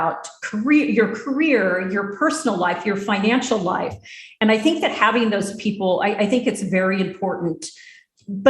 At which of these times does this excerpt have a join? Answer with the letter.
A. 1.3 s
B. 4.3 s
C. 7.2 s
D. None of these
D